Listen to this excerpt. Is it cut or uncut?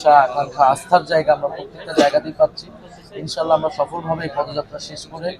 uncut